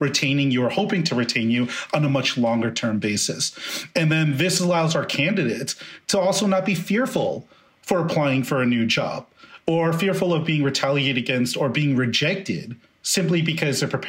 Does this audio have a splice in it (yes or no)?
no